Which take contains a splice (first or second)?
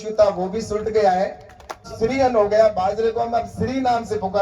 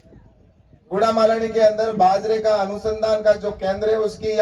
first